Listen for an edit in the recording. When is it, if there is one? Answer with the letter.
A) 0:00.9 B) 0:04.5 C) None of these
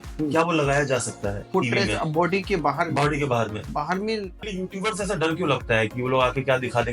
B